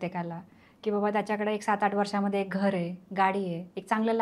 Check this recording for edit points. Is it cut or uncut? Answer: uncut